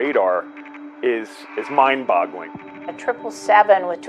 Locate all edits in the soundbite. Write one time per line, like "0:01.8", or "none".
0:02.6

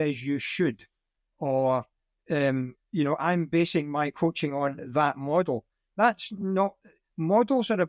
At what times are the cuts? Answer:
none

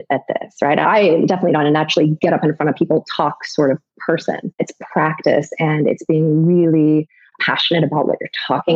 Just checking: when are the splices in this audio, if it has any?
0:04.6

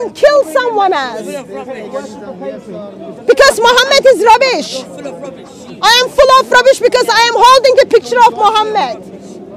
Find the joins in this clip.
none

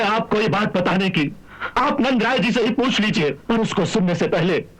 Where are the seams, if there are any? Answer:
0:03.4

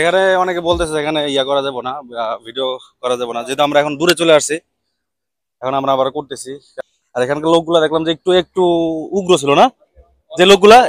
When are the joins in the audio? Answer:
0:06.6

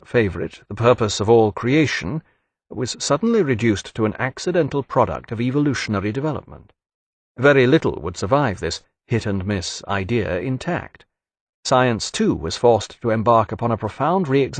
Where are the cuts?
0:04.7

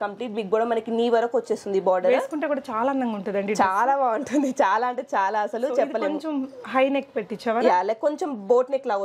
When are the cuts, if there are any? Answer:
none

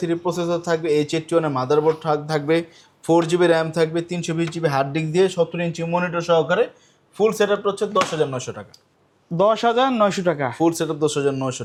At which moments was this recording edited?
none

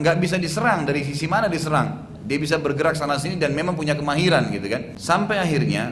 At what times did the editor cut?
0:04.9

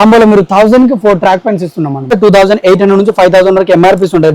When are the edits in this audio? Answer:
0:02.1

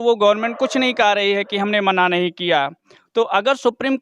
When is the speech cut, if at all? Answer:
none

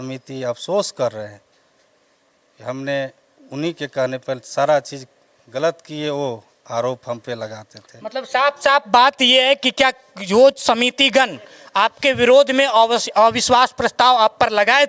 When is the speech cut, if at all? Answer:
none

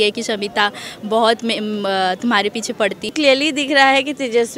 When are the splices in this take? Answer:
0:03.1

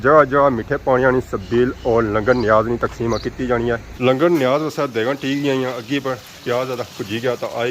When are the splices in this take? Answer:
0:03.9

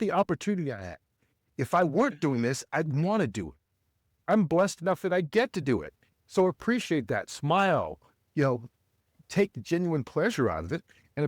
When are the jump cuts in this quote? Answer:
none

